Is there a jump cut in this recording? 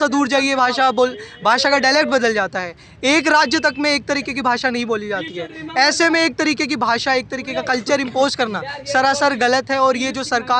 no; 0 cuts

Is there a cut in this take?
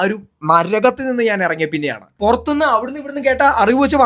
yes; 1 cut; at 2.1 s

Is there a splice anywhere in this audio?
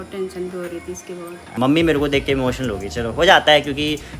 yes; 1 cut; at 1.5 s

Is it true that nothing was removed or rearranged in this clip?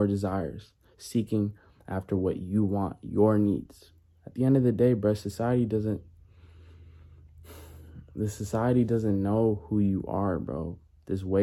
yes; 0 cuts

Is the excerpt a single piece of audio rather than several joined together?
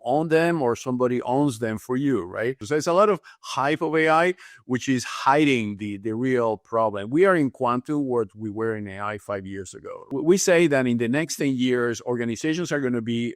no; 2 cuts; at 2.6 s, 10.2 s

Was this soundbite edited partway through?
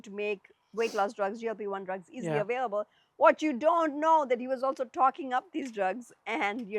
no; 0 cuts

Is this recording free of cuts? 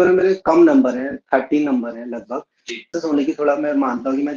no; 1 cut; at 2.8 s

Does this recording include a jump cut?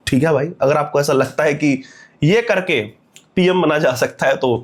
no; 0 cuts

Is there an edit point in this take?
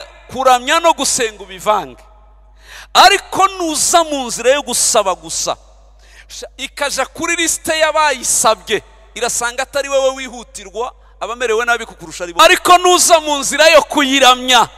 yes; 1 cut; at 12.4 s

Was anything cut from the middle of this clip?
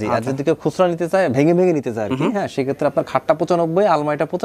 no; 0 cuts

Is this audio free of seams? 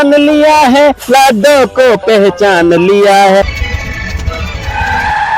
no; 1 cut; at 3.6 s

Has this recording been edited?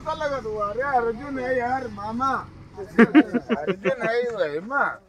no; 0 cuts

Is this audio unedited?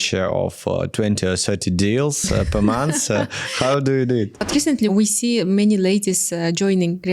no; 1 cut; at 4.6 s

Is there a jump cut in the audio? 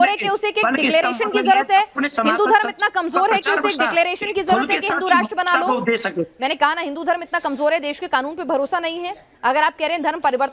no; 0 cuts

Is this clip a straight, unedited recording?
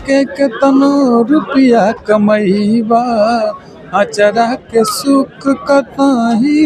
yes; 0 cuts

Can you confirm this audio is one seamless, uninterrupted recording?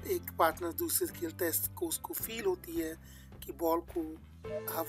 yes; 0 cuts

